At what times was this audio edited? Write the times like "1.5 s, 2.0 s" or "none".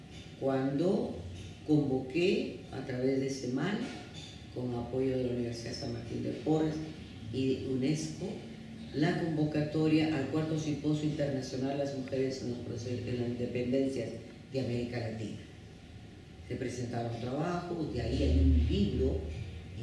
none